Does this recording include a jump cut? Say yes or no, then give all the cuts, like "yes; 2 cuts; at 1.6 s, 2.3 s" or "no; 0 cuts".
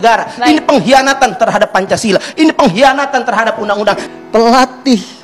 yes; 1 cut; at 4.0 s